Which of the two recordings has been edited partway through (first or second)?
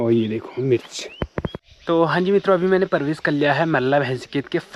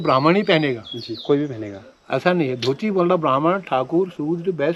first